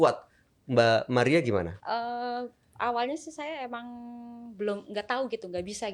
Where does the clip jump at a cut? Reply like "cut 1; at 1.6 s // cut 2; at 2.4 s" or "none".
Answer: cut 1; at 1.8 s